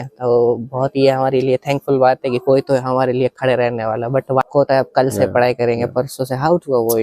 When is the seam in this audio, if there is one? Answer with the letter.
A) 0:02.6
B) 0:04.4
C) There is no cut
B